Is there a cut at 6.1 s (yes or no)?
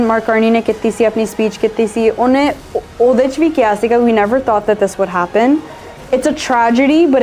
no